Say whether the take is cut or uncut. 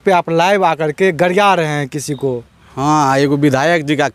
uncut